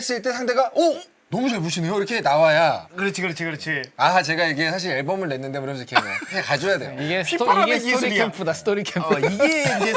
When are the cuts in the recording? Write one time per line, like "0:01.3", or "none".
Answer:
none